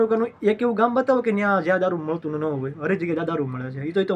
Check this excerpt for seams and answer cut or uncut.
uncut